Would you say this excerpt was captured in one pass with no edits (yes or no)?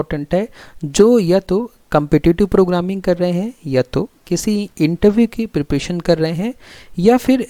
yes